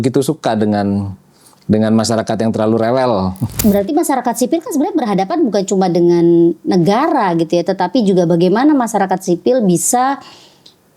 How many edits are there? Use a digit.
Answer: 1